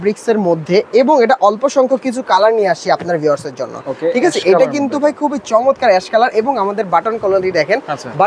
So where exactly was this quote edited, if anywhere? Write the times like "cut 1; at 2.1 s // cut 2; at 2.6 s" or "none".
none